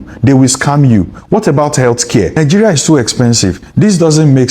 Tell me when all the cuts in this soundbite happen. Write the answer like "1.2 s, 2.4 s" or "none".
2.4 s